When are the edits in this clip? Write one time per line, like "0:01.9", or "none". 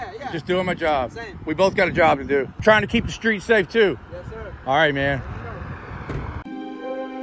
0:02.5
0:06.5